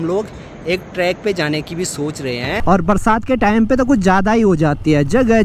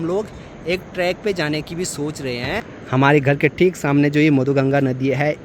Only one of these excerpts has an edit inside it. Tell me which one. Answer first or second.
first